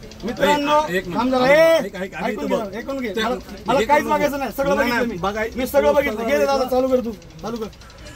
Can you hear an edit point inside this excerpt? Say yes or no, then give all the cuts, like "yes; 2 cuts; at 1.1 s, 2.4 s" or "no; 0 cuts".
no; 0 cuts